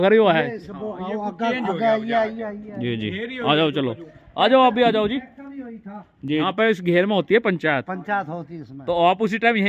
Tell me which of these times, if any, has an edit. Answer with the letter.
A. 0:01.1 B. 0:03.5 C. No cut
C